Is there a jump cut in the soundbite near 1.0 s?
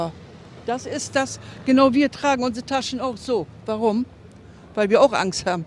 yes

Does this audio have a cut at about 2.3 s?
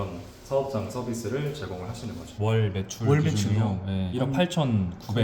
yes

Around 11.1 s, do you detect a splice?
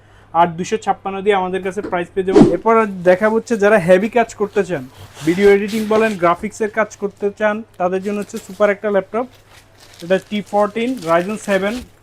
no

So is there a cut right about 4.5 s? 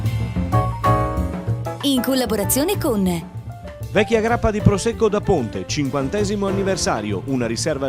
no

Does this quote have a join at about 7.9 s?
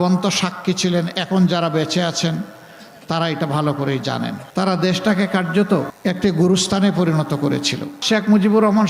yes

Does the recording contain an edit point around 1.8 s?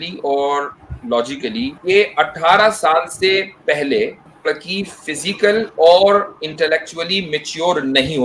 yes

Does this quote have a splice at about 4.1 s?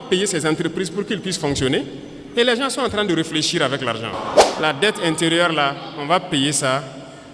yes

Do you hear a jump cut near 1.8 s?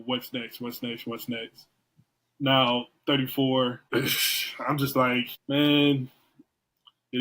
no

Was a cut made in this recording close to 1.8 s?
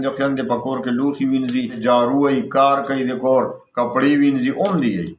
yes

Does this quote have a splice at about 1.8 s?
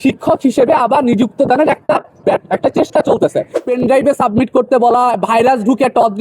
no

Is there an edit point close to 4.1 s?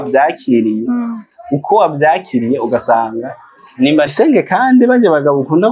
yes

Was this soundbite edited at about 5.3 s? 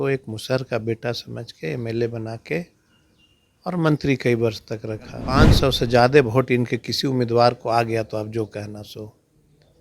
yes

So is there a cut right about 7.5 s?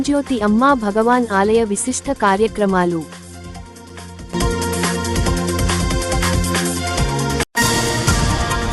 yes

